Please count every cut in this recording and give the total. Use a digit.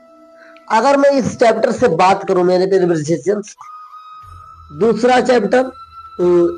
0